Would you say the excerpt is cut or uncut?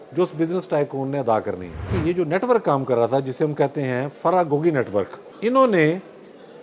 cut